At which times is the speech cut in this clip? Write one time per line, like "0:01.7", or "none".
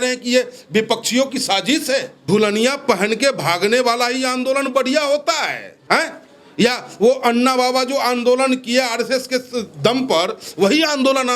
0:02.1
0:05.7